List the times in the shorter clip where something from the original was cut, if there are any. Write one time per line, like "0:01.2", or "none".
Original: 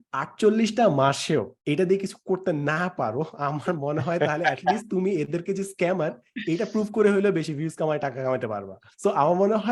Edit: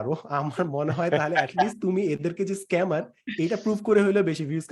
none